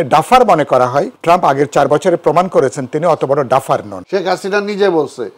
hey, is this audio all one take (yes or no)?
no